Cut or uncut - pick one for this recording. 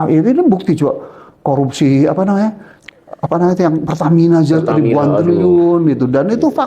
uncut